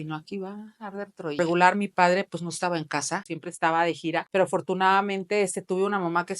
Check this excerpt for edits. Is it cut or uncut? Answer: cut